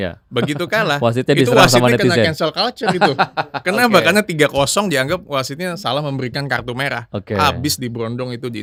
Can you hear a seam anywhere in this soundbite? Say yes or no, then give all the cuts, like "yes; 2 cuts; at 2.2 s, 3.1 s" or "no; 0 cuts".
no; 0 cuts